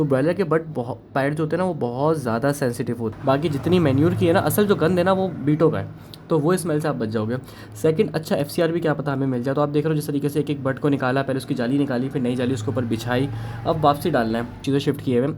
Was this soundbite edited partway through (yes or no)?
yes